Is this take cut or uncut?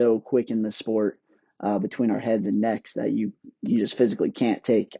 uncut